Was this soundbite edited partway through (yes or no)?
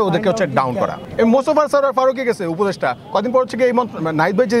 yes